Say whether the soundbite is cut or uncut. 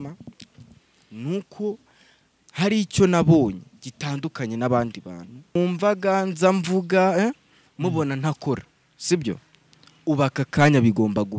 cut